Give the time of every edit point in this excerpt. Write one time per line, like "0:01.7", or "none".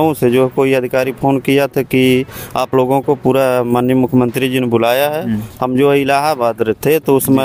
none